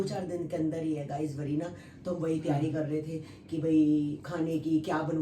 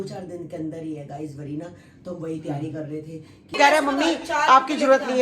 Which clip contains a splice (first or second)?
second